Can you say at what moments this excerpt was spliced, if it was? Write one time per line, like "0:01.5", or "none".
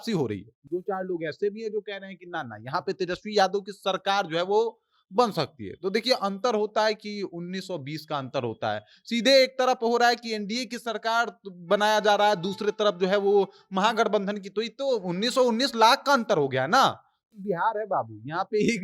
0:17.2